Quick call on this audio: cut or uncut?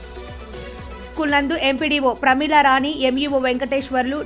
cut